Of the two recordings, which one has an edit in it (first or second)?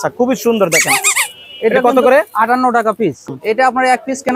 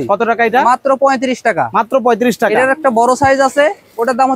first